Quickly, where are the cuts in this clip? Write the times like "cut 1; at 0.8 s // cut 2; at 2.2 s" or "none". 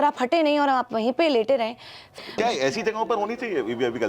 cut 1; at 2.3 s